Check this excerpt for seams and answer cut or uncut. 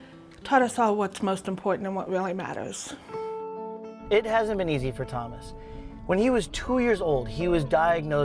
uncut